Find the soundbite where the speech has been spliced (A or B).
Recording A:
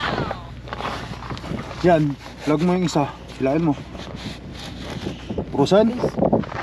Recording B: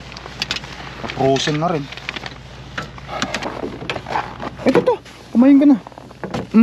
B